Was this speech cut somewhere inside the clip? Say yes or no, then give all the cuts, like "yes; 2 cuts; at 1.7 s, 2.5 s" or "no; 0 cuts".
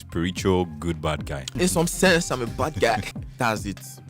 yes; 2 cuts; at 1.6 s, 3.1 s